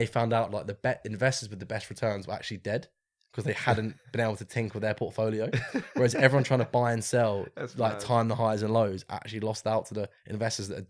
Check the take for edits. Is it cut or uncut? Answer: uncut